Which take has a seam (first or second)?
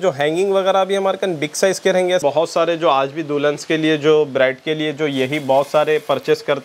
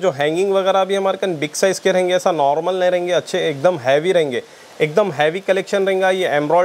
first